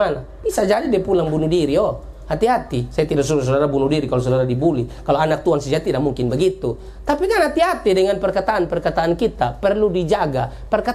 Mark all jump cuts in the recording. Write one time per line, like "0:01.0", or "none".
none